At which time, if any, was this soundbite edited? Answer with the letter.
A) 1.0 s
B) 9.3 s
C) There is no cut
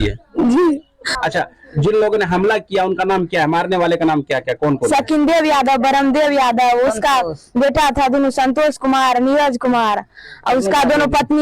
A